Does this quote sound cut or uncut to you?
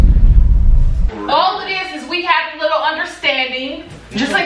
cut